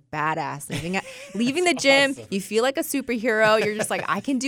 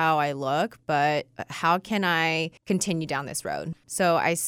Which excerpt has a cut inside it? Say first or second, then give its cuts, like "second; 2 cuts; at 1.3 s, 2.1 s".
second; 2 cuts; at 2.6 s, 3.7 s